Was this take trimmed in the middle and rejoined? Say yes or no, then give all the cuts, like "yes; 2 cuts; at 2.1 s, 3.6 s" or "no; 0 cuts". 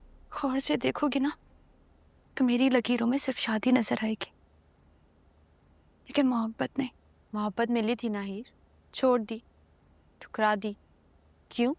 no; 0 cuts